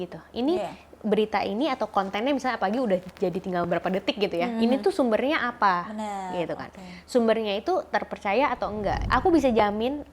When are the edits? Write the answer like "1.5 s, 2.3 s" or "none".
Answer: 9.0 s